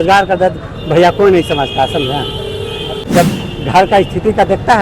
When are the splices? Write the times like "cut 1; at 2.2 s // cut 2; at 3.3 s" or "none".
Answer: cut 1; at 3.0 s